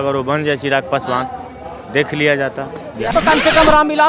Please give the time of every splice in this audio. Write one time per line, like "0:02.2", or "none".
0:03.1